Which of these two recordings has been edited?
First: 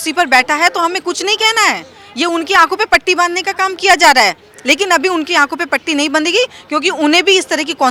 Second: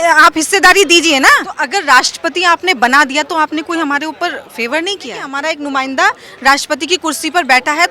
second; 2 cuts; at 1.6 s, 5.3 s

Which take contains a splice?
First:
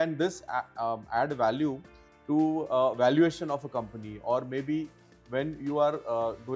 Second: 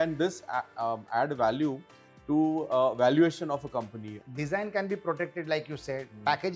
second; 1 cut; at 4.2 s

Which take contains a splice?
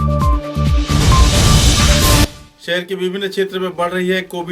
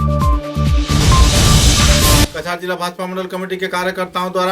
second; 1 cut; at 2.3 s

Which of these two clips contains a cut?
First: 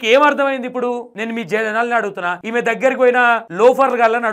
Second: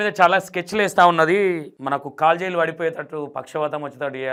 first; 3 cuts; at 1.1 s, 2.4 s, 3.5 s

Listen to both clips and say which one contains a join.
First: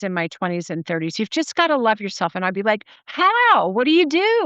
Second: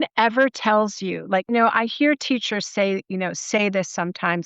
second; 1 cut; at 1.5 s

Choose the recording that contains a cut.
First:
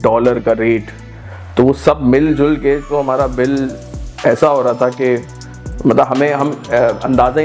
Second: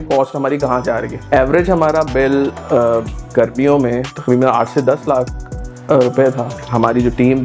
second; 2 cuts; at 1.1 s, 6.5 s

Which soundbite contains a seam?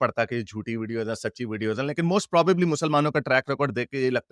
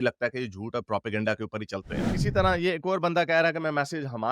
second; 1 cut; at 2.1 s

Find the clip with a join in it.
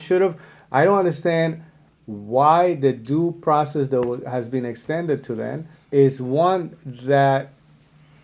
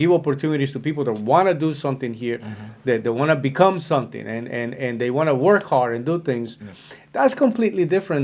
first; 1 cut; at 5.7 s

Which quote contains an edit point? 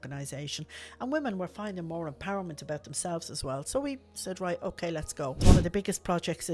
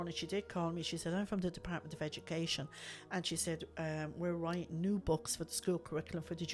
first; 1 cut; at 5.4 s

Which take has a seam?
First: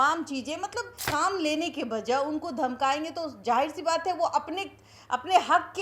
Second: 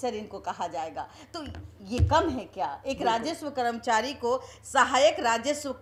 first; 1 cut; at 1.0 s

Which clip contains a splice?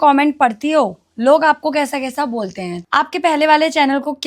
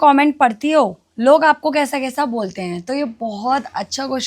first; 1 cut; at 2.8 s

